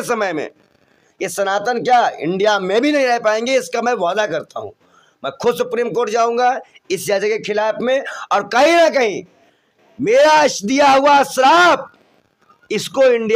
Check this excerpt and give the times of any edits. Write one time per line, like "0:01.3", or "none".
none